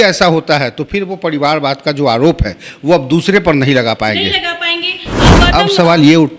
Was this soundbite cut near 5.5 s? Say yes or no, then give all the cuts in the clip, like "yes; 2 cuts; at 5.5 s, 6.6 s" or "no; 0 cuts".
yes; 1 cut; at 5.5 s